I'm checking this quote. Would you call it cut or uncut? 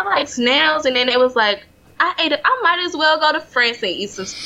cut